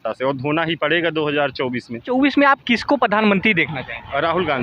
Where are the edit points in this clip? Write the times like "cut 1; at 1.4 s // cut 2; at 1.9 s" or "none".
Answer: cut 1; at 2.1 s